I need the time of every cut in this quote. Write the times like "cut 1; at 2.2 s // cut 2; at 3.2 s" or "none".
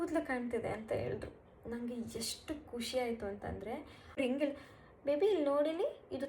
cut 1; at 4.2 s